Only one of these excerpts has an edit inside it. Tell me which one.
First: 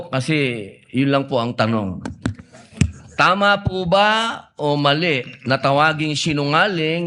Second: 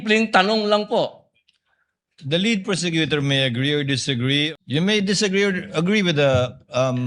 second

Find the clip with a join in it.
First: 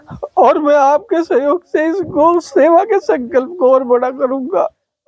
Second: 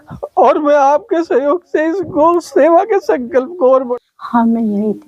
second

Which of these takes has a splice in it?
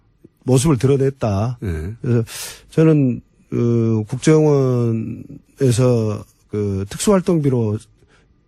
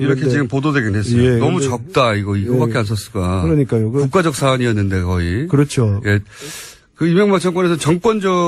first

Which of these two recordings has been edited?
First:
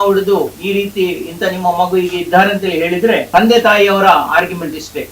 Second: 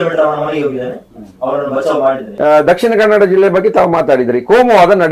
second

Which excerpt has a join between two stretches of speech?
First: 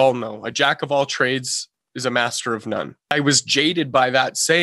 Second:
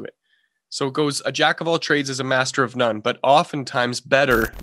first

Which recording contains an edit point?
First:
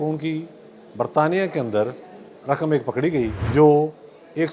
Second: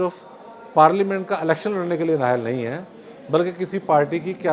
first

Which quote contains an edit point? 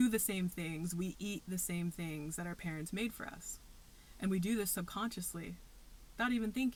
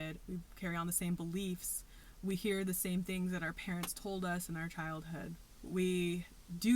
second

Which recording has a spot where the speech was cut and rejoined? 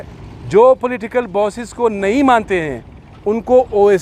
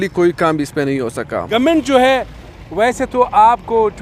second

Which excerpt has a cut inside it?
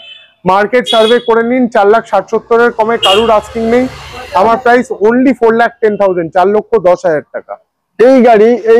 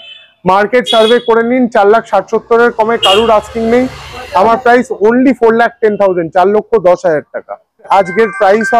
second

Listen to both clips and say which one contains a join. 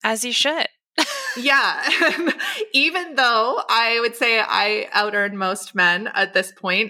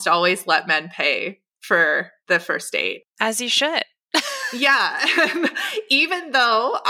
second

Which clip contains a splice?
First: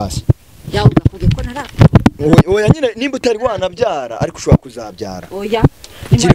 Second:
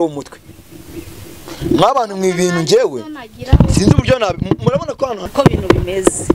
second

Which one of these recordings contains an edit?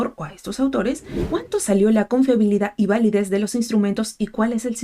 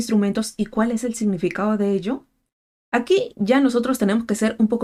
first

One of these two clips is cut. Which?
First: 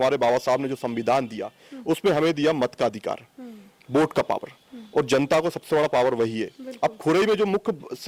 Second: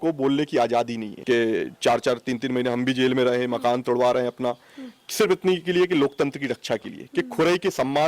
second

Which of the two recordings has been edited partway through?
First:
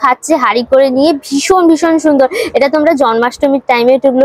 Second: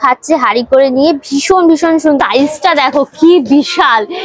second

